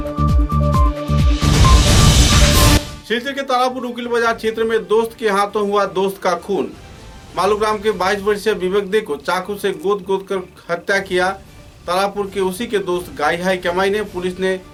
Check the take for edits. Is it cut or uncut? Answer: uncut